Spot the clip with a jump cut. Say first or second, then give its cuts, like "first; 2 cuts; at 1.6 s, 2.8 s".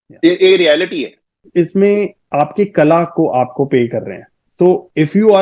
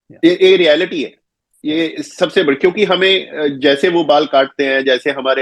first; 1 cut; at 1.4 s